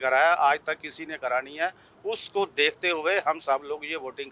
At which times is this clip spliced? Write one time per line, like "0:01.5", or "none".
none

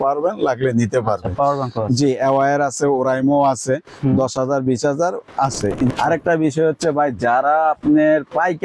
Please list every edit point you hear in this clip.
0:05.9

